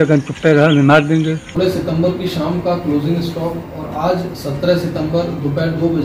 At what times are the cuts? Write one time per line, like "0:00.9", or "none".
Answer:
0:01.5